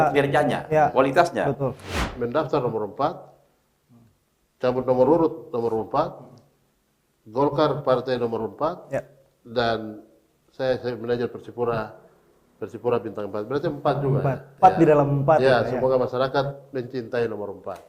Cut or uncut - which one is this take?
cut